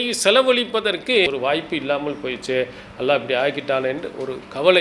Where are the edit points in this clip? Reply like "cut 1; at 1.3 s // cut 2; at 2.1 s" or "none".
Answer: cut 1; at 1.3 s